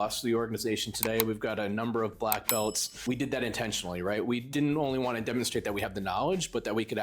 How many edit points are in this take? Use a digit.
2